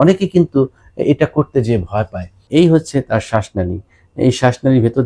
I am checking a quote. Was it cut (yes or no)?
yes